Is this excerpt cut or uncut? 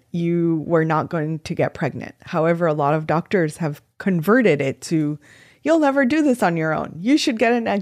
uncut